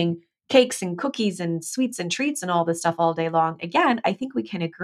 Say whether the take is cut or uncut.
uncut